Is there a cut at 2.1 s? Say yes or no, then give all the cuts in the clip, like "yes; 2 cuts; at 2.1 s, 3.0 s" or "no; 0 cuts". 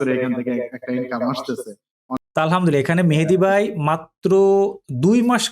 yes; 1 cut; at 2.1 s